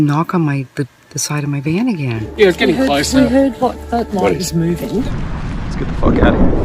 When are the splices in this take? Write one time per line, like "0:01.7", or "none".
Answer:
0:02.2
0:05.1